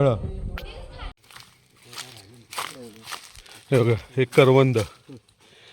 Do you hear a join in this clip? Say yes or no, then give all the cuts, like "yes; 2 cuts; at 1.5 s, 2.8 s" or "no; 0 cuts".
yes; 1 cut; at 1.1 s